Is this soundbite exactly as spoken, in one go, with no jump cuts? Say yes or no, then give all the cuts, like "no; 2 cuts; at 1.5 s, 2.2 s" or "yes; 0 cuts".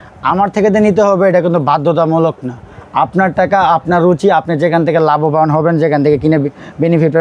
yes; 0 cuts